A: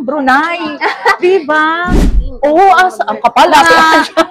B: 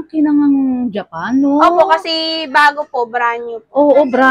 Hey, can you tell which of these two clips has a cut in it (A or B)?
A